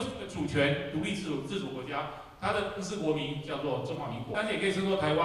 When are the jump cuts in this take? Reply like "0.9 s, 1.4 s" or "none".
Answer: 4.3 s

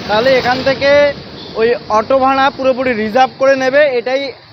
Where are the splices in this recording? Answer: none

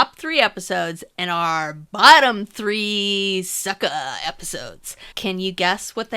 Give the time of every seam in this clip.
5.1 s

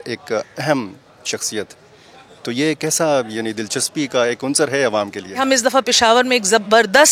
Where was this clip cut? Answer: 5.3 s

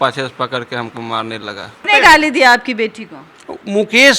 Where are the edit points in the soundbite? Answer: 1.9 s

